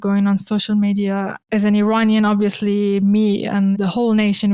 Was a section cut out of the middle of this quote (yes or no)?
yes